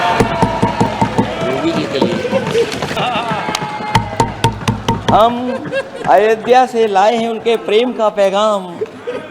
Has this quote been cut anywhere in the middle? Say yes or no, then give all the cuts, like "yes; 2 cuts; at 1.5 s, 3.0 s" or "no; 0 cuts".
yes; 1 cut; at 2.9 s